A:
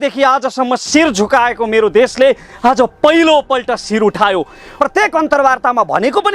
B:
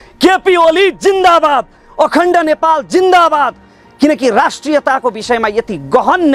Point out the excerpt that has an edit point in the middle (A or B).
A